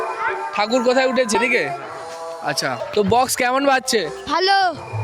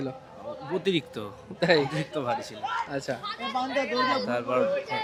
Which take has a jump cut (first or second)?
first